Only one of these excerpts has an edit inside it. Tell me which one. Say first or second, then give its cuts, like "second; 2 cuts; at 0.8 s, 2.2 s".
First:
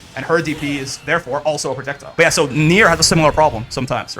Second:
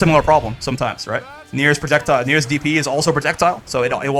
first; 1 cut; at 2.0 s